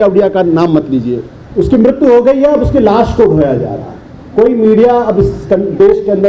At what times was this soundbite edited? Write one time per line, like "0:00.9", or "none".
0:01.3